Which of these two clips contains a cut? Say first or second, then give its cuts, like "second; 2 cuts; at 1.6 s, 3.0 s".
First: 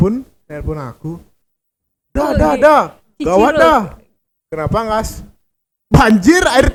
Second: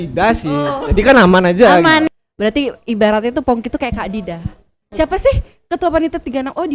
second; 1 cut; at 2.1 s